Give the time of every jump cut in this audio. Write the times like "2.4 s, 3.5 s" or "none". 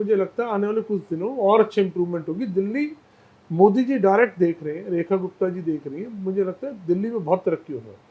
none